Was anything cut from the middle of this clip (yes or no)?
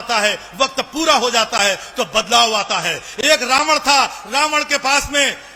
no